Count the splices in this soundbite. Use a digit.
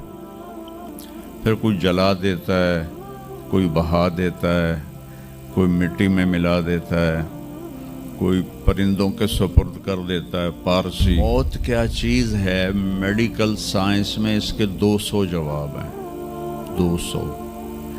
1